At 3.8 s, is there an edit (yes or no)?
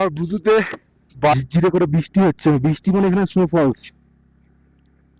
no